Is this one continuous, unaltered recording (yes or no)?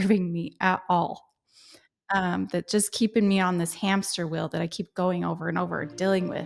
yes